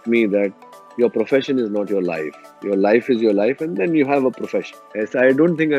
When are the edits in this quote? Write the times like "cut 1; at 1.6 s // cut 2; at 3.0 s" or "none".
cut 1; at 4.7 s